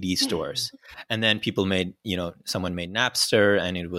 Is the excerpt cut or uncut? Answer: uncut